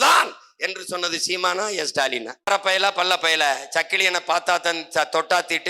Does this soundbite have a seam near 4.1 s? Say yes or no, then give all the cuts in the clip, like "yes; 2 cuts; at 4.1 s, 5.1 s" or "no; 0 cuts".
no; 1 cut; at 2.5 s